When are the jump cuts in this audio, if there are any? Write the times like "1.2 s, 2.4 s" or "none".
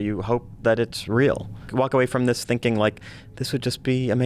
1.7 s

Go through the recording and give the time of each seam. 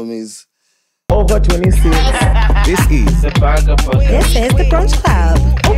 1.1 s

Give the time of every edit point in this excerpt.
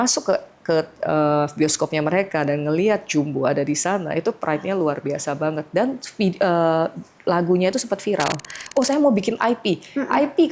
8.6 s

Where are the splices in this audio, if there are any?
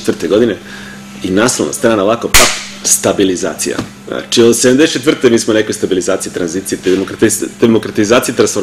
none

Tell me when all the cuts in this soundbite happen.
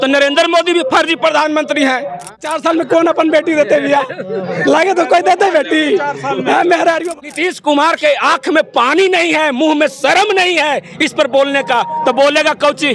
2.5 s, 7.1 s

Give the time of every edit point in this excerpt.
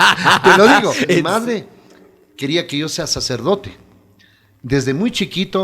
1.1 s

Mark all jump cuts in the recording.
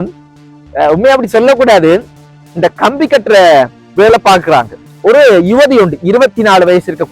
4.8 s

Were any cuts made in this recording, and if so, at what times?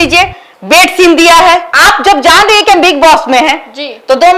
1.7 s

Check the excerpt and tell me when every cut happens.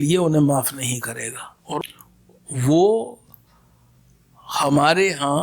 1.9 s

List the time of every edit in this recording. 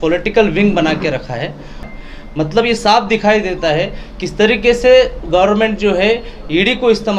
1.9 s

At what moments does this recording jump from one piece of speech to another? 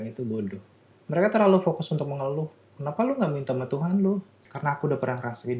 0.9 s, 2.6 s, 4.4 s

